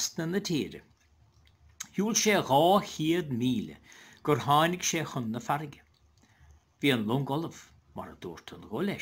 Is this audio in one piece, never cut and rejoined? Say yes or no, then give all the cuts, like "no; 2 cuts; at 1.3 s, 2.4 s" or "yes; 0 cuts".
yes; 0 cuts